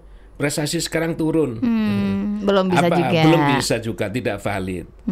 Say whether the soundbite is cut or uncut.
uncut